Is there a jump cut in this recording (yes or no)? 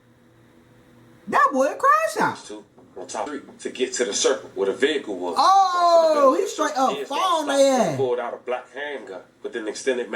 yes